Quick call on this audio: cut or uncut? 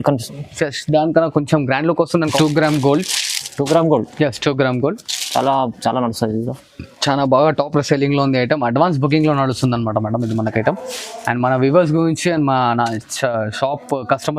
cut